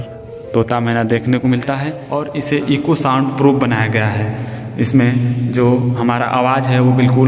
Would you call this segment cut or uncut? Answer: cut